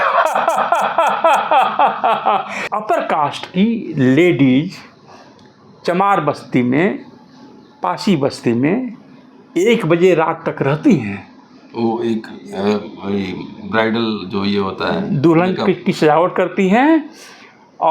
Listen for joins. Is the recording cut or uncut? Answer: cut